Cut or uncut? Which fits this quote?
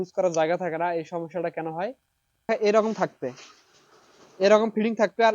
cut